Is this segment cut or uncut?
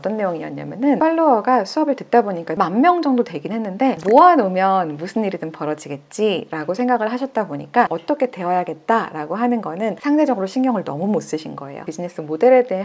cut